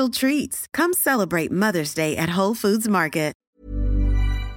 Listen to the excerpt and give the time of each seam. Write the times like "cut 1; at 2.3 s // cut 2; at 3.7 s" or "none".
cut 1; at 3.4 s